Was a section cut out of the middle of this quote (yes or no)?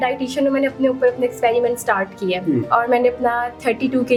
no